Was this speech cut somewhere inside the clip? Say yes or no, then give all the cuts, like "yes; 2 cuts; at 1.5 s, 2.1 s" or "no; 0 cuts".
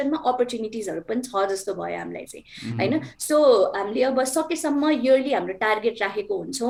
no; 0 cuts